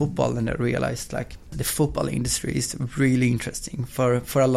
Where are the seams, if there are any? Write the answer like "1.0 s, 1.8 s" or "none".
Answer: none

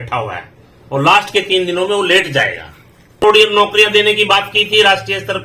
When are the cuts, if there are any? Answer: 3.2 s

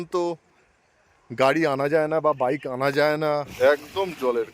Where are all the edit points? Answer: 3.5 s

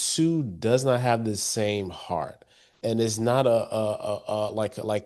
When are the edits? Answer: none

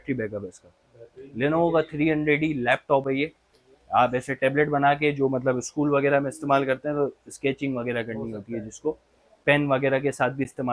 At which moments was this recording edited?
none

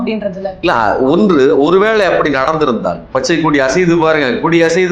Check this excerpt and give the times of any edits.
3.0 s

